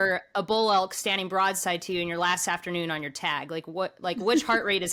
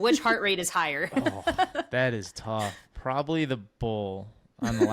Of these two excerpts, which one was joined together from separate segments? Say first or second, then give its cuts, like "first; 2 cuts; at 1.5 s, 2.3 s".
second; 1 cut; at 2.9 s